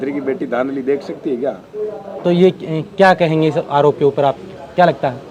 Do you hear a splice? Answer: no; 0 cuts

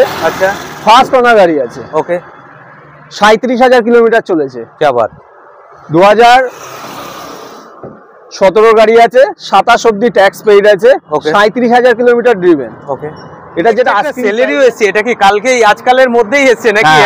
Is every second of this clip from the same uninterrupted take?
no; 1 cut; at 14.1 s

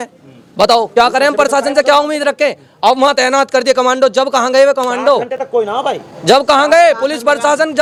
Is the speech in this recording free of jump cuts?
yes; 0 cuts

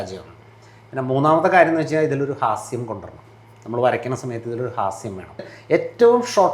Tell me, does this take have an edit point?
yes; 1 cut; at 5.5 s

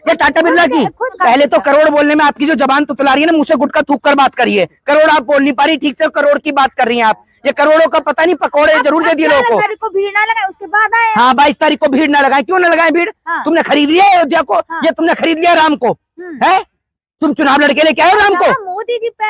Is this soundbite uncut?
no; 2 cuts; at 1.2 s, 9.6 s

